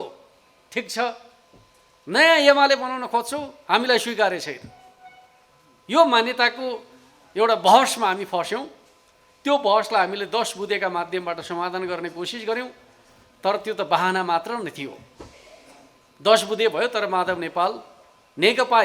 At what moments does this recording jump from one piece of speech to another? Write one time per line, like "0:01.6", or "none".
none